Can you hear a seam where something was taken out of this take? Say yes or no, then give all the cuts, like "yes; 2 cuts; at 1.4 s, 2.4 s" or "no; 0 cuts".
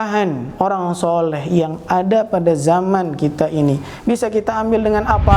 no; 0 cuts